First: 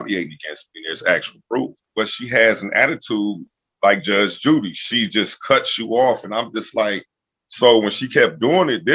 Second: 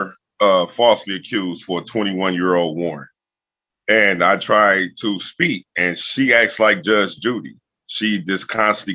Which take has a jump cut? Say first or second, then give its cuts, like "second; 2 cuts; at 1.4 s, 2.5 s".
first; 1 cut; at 1.9 s